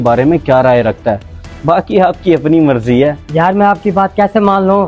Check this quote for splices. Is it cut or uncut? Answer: cut